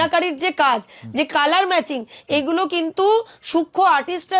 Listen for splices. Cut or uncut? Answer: uncut